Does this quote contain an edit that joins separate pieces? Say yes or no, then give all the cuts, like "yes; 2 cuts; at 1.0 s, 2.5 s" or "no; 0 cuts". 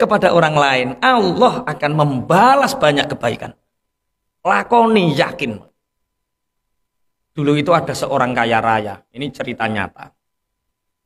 no; 0 cuts